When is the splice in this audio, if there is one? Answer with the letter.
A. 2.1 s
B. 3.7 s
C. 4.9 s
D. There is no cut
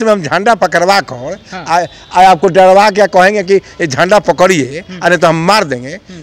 D